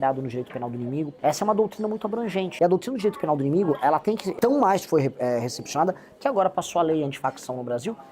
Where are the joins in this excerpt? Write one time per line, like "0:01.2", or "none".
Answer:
0:01.1
0:02.5
0:04.3

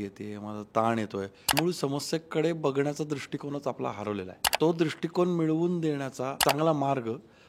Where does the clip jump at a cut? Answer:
0:01.5
0:04.5
0:06.4

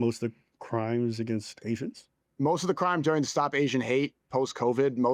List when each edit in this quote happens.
none

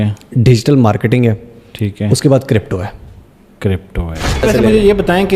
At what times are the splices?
0:04.4

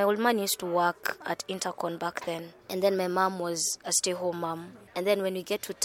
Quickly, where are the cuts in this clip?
0:01.2
0:04.8

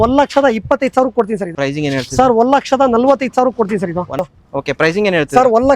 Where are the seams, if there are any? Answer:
0:01.5
0:04.2

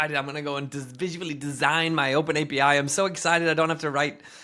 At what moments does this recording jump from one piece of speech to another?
none

